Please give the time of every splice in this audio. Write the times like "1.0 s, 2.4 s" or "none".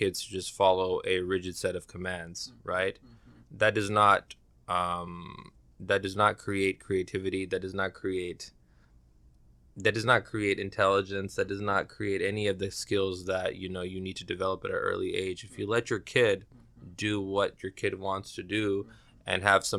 none